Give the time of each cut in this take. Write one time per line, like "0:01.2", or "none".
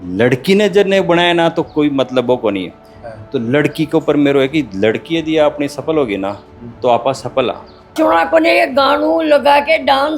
0:07.9

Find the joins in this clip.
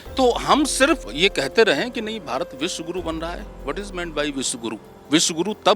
0:01.1
0:04.9

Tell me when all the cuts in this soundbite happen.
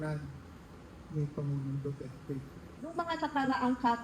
0:03.0

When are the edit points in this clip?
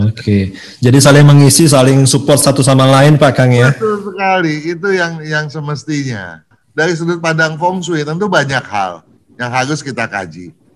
0:06.5

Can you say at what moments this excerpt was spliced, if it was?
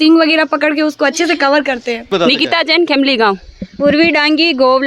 0:02.1

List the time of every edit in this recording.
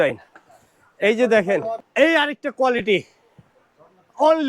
0:01.8

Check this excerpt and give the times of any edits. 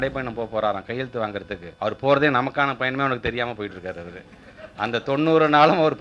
0:01.6

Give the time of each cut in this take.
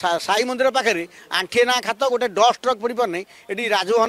none

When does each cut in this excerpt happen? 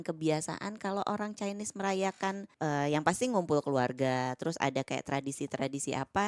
0:02.5

